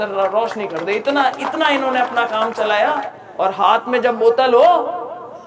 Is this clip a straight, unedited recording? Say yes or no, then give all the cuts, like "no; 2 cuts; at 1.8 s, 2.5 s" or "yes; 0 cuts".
no; 1 cut; at 3.2 s